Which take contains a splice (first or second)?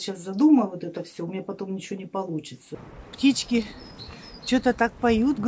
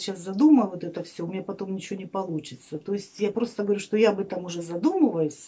first